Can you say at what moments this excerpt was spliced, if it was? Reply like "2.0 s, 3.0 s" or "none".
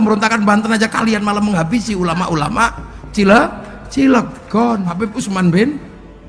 5.1 s